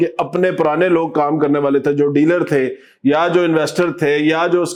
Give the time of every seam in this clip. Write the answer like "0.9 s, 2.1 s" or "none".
none